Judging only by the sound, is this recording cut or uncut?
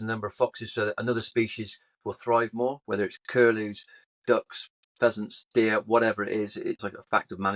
cut